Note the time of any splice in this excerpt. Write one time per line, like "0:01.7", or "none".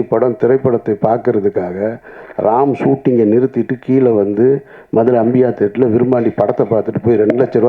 none